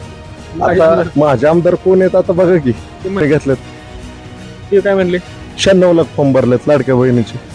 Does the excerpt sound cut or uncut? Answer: cut